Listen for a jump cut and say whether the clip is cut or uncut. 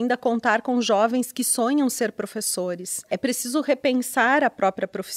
cut